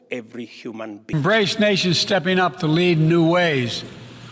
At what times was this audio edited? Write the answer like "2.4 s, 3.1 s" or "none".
1.1 s